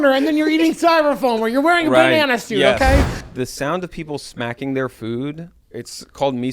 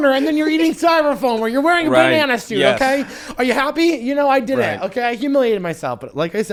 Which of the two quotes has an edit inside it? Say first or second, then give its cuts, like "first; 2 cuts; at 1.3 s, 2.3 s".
first; 2 cuts; at 3.2 s, 5.6 s